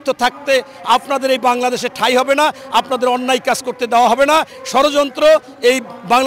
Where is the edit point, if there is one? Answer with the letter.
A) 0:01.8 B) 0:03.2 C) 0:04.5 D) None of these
D